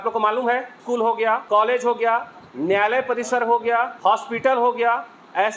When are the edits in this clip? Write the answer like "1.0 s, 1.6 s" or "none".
0.9 s, 3.9 s

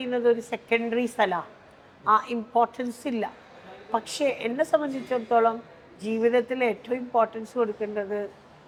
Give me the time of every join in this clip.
none

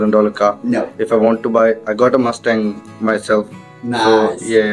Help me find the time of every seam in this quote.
none

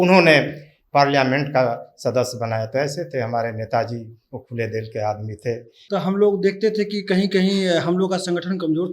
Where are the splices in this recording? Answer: 5.7 s

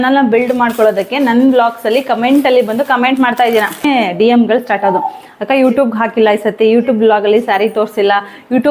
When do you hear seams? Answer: 3.8 s

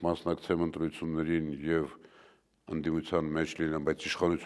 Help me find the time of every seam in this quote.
none

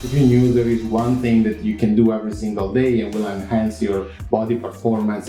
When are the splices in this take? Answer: none

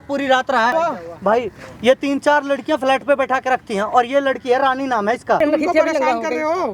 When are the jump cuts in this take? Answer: 0.7 s, 5.4 s

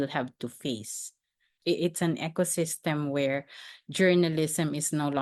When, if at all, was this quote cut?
none

